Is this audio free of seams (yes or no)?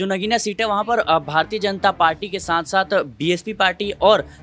yes